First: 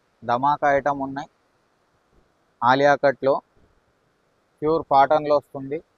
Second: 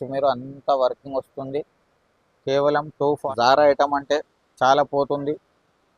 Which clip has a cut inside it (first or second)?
second